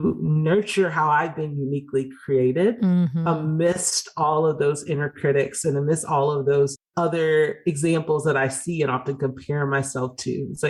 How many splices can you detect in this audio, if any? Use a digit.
0